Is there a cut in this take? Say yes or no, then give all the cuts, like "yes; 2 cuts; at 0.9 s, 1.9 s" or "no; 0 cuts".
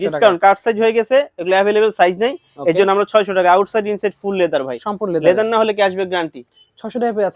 no; 0 cuts